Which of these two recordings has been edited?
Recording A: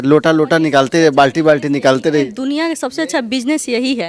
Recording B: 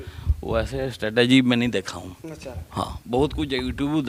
A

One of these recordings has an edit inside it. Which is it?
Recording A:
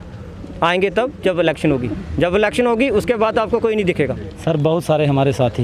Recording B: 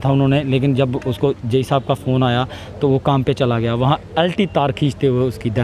A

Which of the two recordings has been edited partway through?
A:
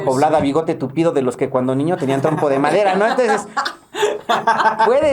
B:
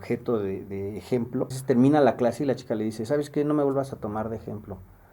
B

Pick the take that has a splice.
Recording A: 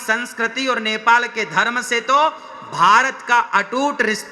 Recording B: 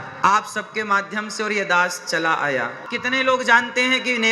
B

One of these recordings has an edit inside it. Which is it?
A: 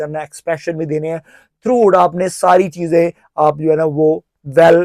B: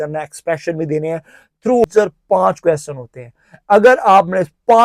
B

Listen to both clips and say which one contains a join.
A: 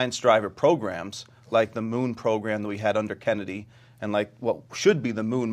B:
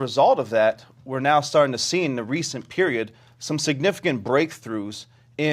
A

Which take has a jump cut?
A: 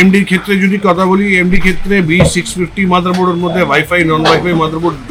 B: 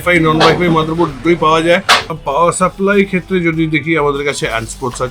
B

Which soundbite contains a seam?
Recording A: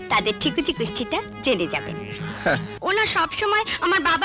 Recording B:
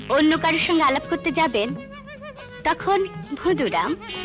A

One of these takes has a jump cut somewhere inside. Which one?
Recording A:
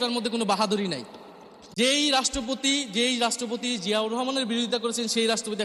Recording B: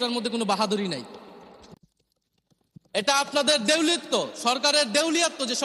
A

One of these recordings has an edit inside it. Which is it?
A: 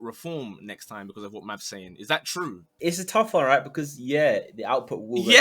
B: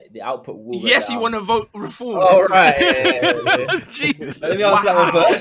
A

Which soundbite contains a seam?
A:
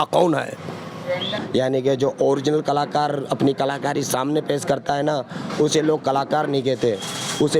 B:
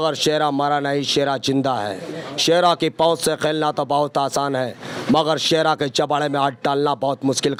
A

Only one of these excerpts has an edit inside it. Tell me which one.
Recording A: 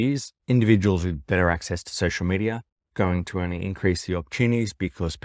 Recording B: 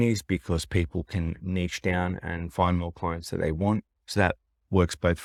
A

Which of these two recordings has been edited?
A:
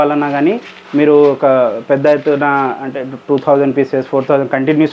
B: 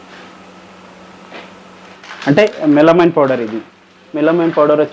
B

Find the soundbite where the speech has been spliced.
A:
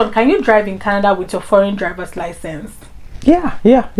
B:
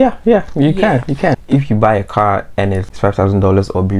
B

